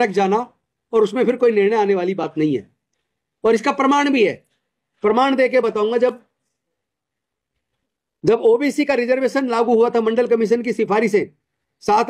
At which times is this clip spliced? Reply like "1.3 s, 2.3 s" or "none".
none

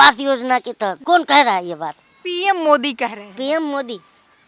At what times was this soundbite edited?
1.0 s

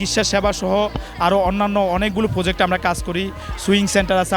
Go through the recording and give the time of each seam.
none

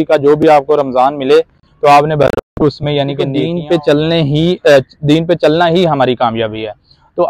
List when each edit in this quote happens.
3.5 s

